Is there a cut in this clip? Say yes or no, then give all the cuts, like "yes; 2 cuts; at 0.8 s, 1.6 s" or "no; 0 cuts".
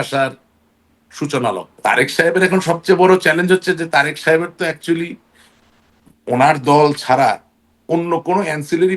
yes; 1 cut; at 1.7 s